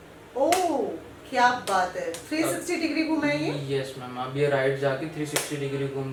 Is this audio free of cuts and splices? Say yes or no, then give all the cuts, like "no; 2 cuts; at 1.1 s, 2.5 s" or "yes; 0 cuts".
yes; 0 cuts